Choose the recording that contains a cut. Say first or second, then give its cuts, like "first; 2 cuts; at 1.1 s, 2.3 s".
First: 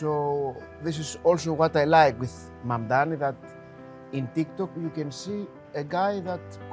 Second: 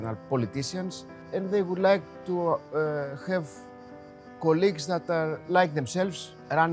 second; 1 cut; at 1.1 s